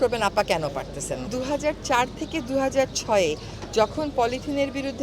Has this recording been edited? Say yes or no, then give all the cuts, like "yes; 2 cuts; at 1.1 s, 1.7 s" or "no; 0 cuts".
yes; 1 cut; at 1.2 s